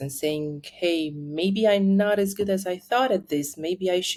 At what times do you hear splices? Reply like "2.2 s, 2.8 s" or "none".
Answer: none